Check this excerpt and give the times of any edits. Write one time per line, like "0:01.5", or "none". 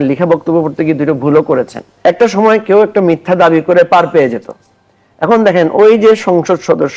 0:01.8